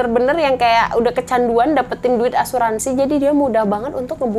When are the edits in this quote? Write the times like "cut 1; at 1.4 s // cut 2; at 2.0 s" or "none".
none

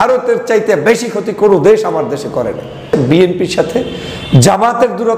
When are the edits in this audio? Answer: cut 1; at 2.9 s

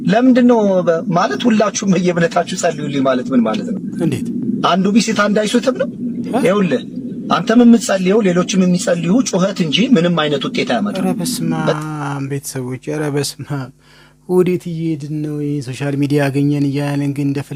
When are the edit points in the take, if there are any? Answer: none

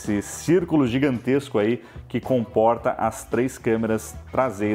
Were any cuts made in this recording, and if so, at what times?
none

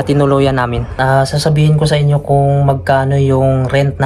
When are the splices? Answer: cut 1; at 0.9 s

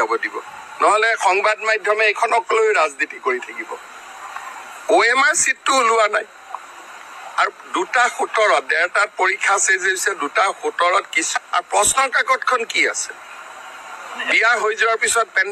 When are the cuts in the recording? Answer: cut 1; at 11.2 s

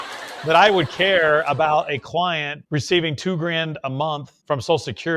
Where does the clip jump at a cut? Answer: cut 1; at 2.5 s // cut 2; at 4.3 s

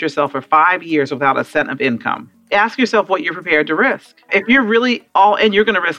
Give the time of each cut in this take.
cut 1; at 2.3 s // cut 2; at 4.3 s

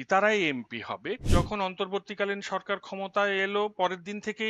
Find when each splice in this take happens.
cut 1; at 1.2 s

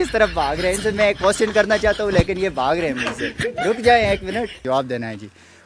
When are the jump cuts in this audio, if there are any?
cut 1; at 4.6 s

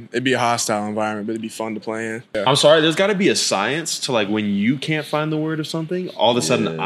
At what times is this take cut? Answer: cut 1; at 2.4 s

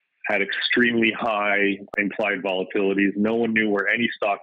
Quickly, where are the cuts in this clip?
cut 1; at 1.9 s

